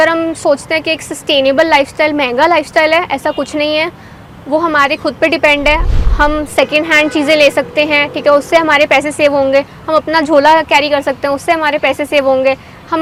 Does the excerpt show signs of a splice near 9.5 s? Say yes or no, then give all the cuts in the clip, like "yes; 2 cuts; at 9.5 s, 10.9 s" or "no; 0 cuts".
no; 0 cuts